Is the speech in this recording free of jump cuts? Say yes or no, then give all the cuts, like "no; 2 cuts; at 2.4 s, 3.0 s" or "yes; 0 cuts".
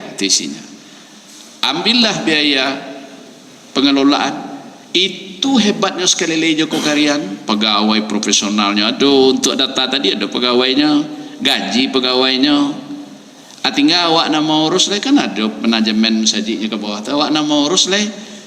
yes; 0 cuts